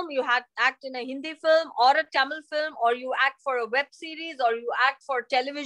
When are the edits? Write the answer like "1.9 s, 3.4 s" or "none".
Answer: none